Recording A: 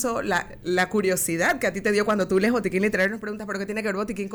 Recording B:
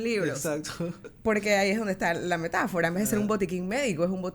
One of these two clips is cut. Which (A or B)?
B